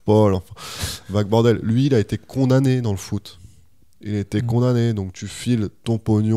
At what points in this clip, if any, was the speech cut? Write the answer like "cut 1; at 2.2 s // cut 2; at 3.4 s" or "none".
none